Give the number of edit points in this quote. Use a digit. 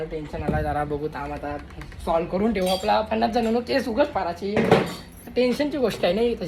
0